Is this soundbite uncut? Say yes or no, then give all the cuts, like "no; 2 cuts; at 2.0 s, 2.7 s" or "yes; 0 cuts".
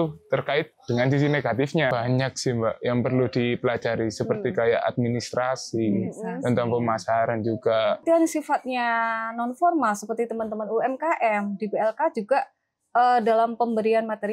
no; 2 cuts; at 1.9 s, 8.0 s